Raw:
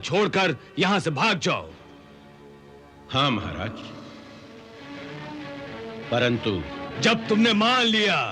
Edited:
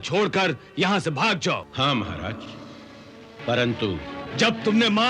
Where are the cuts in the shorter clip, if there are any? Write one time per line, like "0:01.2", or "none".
0:01.7
0:03.4